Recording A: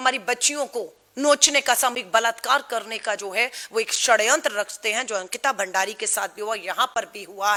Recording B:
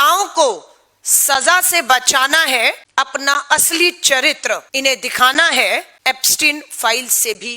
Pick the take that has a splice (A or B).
B